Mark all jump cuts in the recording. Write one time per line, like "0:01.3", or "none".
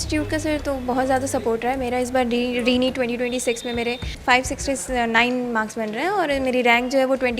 0:04.1